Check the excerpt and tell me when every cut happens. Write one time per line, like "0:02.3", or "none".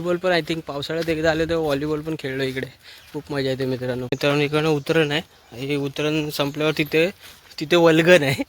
0:04.1